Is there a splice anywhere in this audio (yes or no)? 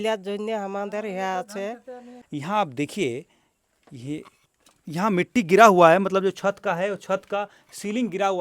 yes